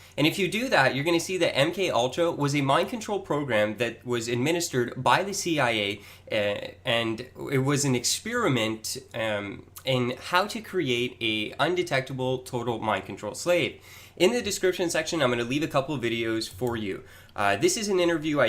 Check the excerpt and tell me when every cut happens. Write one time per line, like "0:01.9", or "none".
0:04.3